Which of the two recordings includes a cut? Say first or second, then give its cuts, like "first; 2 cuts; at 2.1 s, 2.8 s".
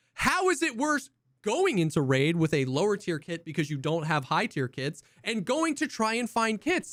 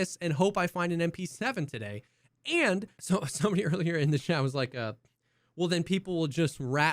second; 1 cut; at 2.9 s